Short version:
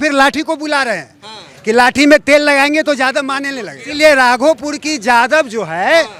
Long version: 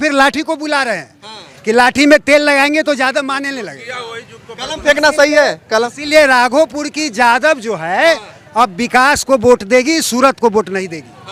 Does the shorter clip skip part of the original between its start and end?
yes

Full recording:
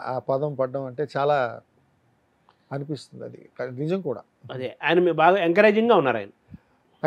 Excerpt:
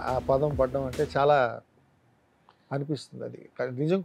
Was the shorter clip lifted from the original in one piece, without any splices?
yes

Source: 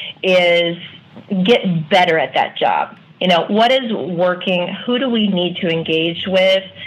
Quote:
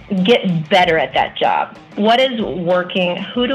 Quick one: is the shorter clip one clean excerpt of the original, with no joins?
no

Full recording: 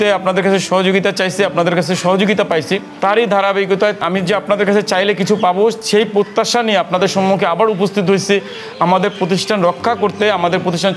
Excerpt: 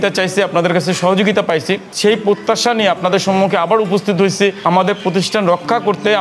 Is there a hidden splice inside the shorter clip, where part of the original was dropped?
yes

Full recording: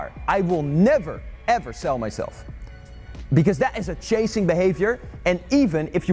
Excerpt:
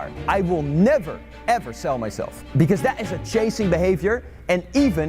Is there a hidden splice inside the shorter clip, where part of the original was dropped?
yes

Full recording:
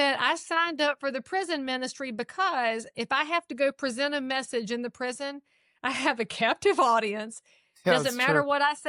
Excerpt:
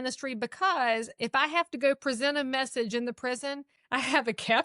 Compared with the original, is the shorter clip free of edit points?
no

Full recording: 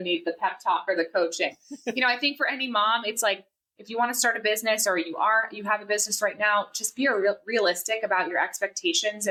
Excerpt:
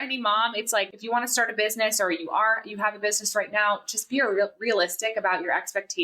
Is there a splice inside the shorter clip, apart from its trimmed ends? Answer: yes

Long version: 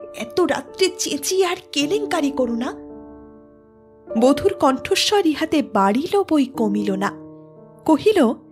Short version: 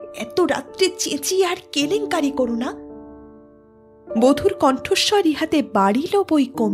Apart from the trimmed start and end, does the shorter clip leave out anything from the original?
no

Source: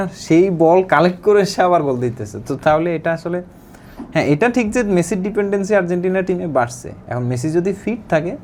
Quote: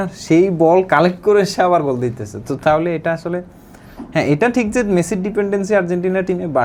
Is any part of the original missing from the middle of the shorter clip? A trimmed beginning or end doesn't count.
no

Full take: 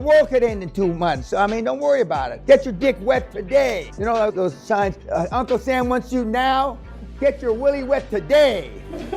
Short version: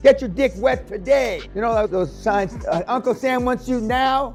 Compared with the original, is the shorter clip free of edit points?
yes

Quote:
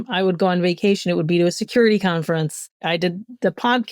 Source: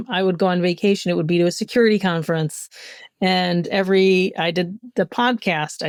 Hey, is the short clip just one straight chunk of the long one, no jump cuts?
no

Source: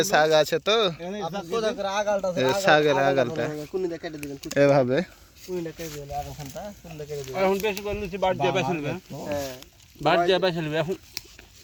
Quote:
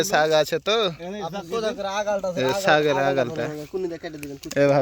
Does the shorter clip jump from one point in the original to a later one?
no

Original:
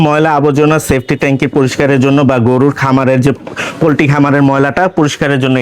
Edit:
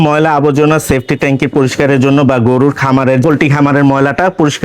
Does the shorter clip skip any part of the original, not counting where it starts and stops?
yes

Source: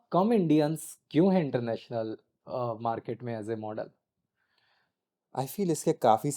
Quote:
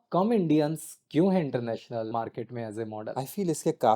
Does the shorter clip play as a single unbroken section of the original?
no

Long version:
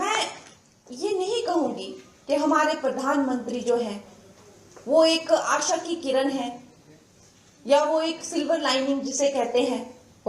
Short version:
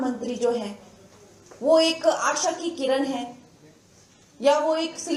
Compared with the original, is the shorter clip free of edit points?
yes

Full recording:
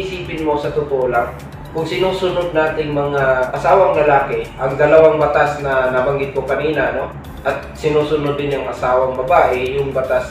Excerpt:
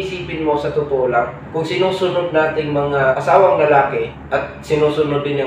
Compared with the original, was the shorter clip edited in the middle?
yes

